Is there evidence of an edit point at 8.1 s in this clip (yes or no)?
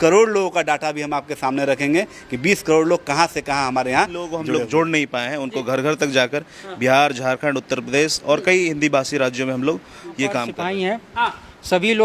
no